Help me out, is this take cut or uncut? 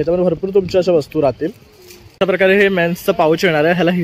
cut